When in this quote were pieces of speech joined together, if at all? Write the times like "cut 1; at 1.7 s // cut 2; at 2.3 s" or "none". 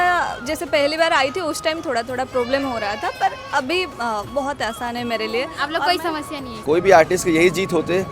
cut 1; at 6.5 s